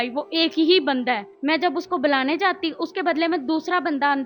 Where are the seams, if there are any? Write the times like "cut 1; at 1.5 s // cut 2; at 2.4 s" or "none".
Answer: cut 1; at 1.3 s